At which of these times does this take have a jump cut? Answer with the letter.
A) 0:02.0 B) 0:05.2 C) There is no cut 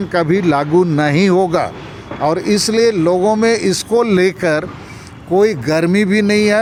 C